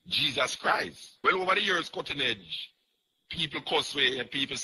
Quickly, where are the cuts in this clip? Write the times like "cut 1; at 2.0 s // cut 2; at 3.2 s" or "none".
cut 1; at 1.0 s